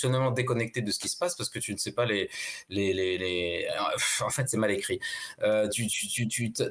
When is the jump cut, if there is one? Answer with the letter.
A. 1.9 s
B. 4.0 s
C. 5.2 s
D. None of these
D